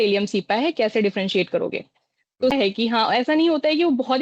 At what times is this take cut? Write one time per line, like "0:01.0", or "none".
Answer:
0:02.5